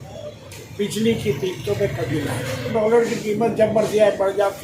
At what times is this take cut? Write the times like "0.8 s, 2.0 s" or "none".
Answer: 2.7 s